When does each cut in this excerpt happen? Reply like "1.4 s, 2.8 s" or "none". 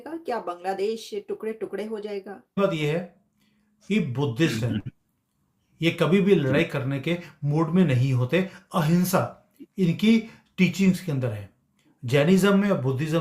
2.4 s